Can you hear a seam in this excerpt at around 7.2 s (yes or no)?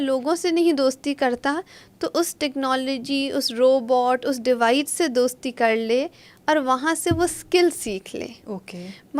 no